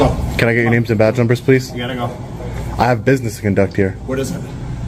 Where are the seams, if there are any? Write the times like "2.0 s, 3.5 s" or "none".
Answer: none

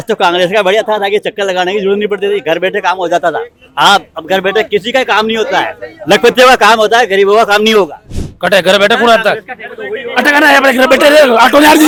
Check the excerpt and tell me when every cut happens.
none

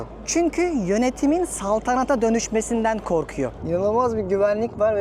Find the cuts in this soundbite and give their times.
3.6 s

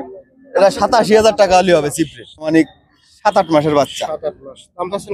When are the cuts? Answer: 2.5 s

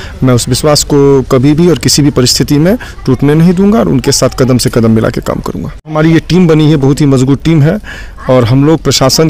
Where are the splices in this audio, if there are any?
5.9 s

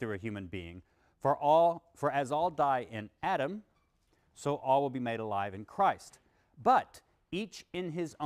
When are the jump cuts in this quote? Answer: none

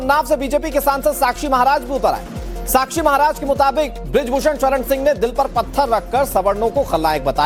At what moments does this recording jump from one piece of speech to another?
none

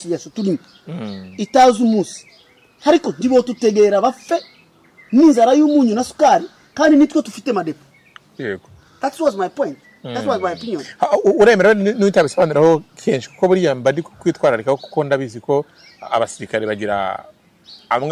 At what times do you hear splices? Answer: none

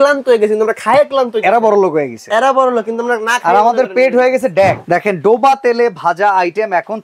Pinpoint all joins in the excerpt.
4.8 s

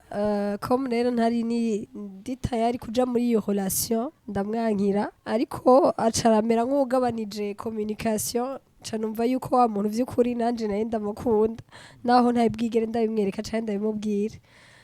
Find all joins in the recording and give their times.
1.9 s, 4.2 s, 5.2 s

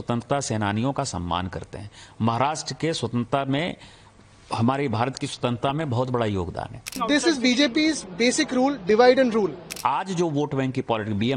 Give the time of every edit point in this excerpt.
7.0 s, 9.7 s

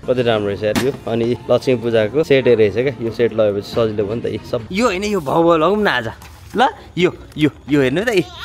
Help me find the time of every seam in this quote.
1.4 s, 2.3 s, 4.6 s

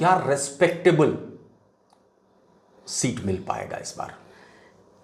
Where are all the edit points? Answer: none

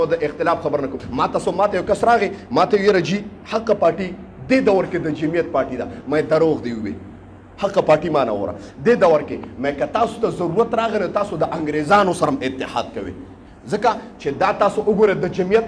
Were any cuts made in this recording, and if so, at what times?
1.0 s

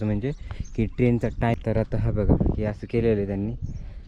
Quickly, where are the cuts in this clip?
1.5 s

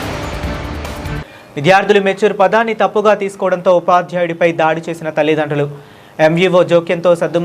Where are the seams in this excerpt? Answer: 1.1 s

